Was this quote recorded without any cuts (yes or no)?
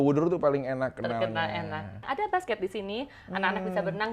no